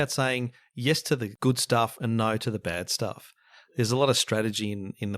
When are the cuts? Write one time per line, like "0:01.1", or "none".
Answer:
0:01.3